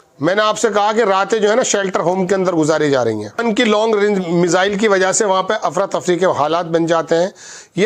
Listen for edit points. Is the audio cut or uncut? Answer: uncut